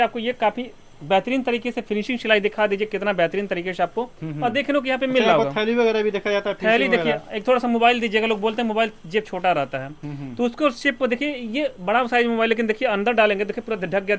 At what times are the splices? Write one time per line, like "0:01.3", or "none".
none